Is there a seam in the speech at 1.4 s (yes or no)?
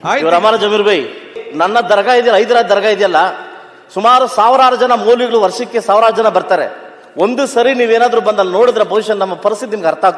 yes